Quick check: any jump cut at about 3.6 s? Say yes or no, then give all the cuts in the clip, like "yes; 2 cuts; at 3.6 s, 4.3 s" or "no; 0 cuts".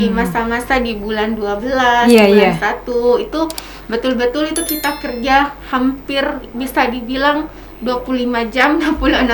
no; 0 cuts